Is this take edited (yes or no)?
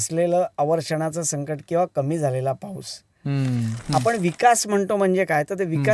yes